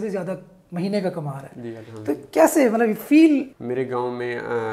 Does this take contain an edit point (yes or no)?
yes